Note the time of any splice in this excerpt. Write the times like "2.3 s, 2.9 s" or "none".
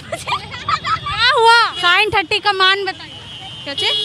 1.8 s